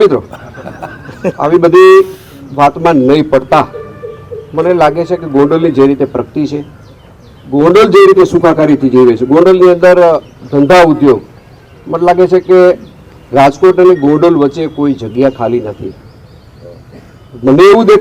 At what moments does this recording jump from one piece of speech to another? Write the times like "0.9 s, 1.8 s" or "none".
none